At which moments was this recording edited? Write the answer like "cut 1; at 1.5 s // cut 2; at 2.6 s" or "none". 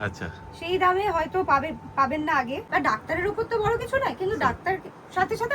cut 1; at 2.6 s